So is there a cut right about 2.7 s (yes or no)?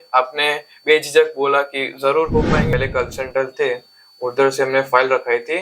yes